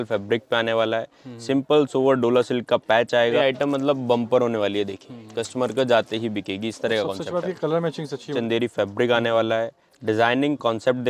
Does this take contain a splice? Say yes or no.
yes